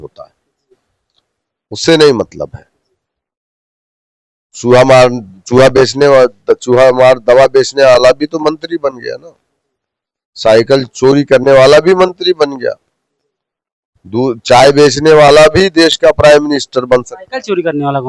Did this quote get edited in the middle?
no; 0 cuts

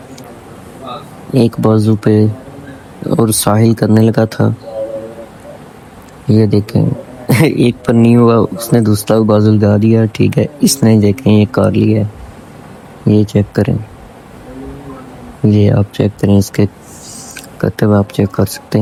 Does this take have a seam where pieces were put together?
no; 0 cuts

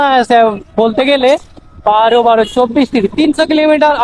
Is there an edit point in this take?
no; 0 cuts

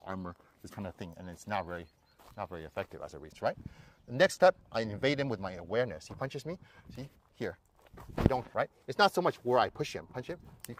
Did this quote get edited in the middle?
yes; 2 cuts; at 3.3 s, 8.5 s

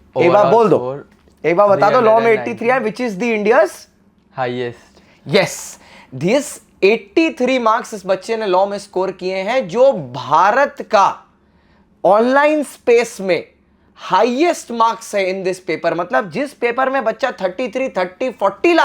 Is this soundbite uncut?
yes; 0 cuts

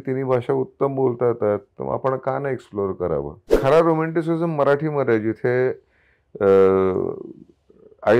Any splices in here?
yes; 1 cut; at 3.5 s

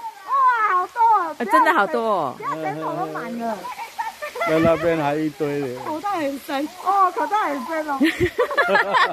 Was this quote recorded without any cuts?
yes; 0 cuts

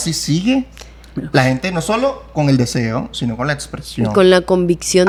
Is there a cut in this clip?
no; 0 cuts

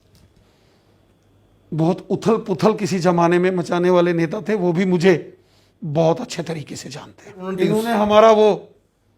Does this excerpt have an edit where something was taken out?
yes; 1 cut; at 7.4 s

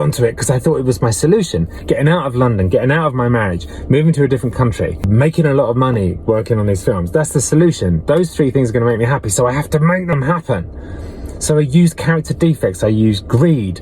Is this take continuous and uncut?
no; 1 cut; at 5.0 s

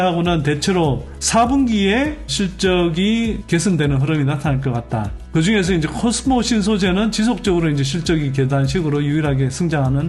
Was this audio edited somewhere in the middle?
no; 0 cuts

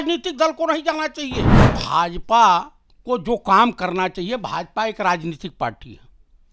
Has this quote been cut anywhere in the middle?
yes; 1 cut; at 1.8 s

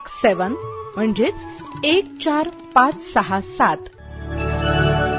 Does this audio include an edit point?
yes; 1 cut; at 4.2 s

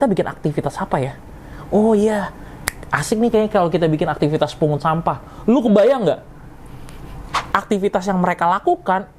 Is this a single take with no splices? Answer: no; 1 cut; at 7.3 s

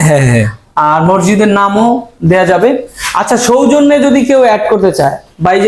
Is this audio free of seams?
yes; 0 cuts

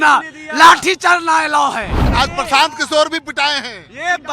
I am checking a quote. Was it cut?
yes; 1 cut; at 2.0 s

